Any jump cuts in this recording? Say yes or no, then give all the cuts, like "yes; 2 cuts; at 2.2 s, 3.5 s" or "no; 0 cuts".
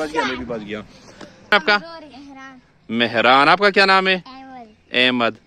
yes; 1 cut; at 1.5 s